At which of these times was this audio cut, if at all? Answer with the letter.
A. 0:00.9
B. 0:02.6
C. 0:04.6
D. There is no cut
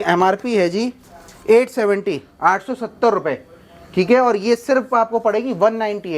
D